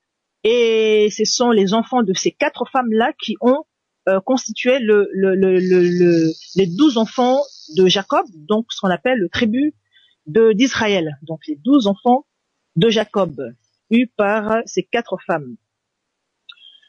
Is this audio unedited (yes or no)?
yes